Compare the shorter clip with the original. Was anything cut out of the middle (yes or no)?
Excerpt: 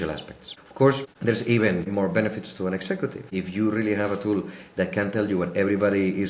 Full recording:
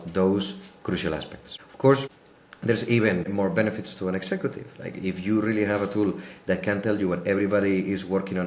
yes